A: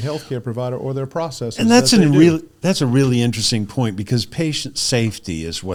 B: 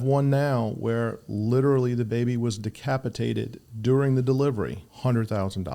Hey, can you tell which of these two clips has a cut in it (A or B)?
B